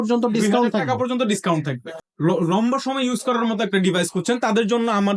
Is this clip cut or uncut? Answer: cut